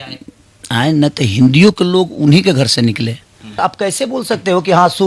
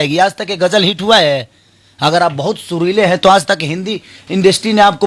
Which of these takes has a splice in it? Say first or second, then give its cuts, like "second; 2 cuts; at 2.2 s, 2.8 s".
first; 1 cut; at 3.6 s